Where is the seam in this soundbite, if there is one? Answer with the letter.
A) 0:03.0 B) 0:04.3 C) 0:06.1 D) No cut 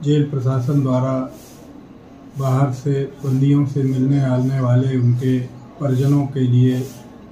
C